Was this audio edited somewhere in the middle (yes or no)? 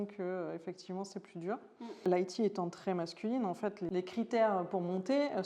yes